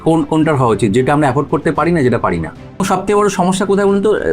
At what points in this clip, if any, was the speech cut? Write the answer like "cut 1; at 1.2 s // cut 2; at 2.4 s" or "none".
cut 1; at 2.8 s